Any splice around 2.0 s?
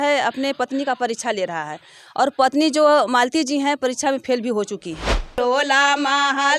no; 1 cut; at 5.3 s

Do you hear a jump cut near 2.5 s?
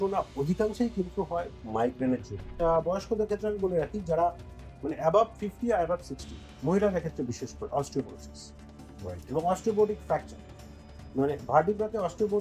yes; 2 cuts; at 1.5 s, 2.5 s

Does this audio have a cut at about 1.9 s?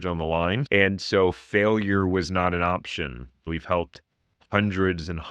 no; 1 cut; at 3.5 s

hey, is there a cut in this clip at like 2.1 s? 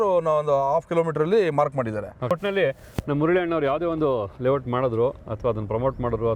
yes; 1 cut; at 2.1 s

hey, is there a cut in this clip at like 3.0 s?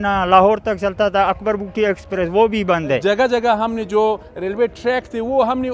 yes; 1 cut; at 3.0 s

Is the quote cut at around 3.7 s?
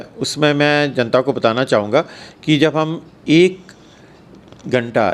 no; 0 cuts

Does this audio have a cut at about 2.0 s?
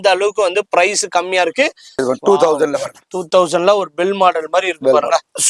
yes; 1 cut; at 2.0 s

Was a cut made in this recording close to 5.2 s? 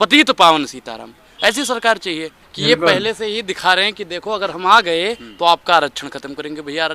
no; 1 cut; at 2.4 s

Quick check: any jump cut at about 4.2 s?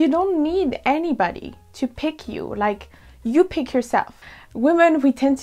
yes; 1 cut; at 4.2 s

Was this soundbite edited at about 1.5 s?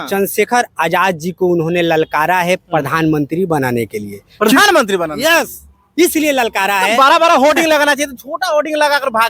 no; 0 cuts

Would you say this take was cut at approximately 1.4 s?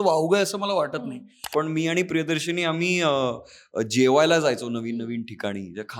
yes; 1 cut; at 1.4 s

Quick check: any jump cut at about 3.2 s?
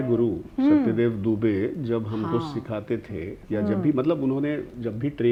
no; 0 cuts

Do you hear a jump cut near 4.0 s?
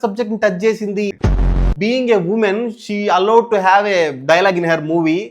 no; 1 cut; at 1.4 s

